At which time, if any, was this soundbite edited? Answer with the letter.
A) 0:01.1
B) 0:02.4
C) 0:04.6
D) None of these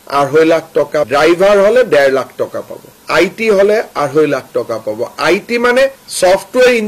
A